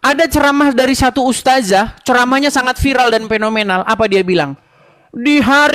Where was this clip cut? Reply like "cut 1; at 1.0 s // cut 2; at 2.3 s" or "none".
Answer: none

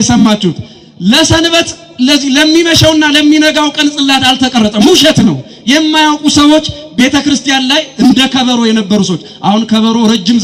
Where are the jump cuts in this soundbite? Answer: none

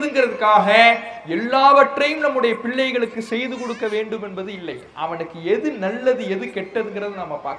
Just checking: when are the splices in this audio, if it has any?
none

